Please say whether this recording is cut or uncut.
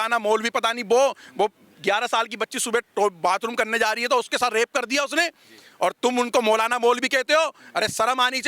uncut